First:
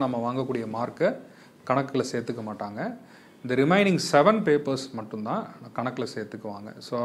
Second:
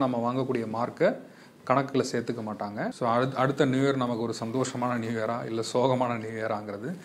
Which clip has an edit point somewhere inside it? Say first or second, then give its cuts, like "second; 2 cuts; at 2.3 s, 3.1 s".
second; 1 cut; at 2.9 s